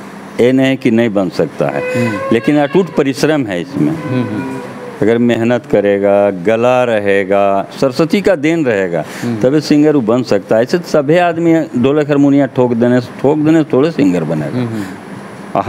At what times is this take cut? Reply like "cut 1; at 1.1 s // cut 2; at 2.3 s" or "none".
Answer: none